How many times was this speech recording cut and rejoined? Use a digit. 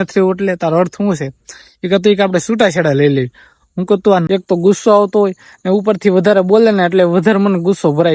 1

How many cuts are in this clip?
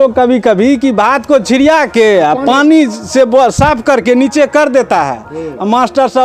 0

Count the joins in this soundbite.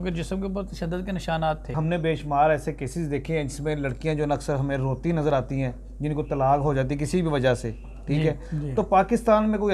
1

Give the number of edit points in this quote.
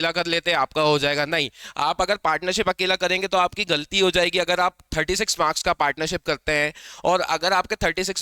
0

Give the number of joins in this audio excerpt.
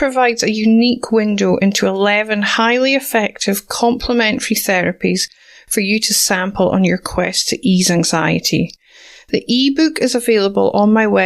0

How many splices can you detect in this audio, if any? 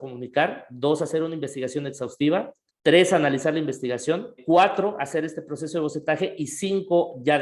2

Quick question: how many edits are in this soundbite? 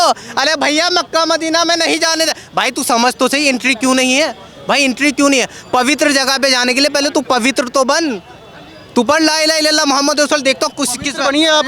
0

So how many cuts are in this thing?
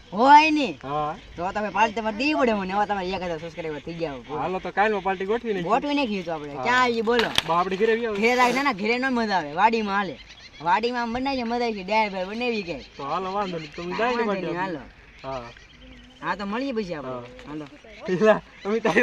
0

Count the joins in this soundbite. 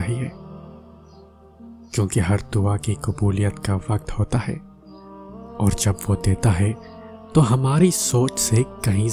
0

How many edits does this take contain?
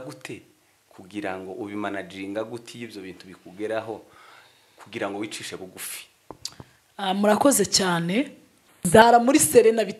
1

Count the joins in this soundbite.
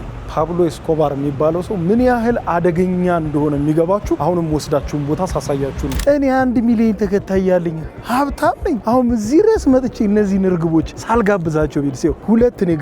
1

